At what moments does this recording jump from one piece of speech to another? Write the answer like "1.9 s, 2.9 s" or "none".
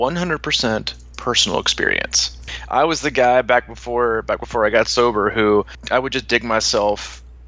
2.5 s, 5.8 s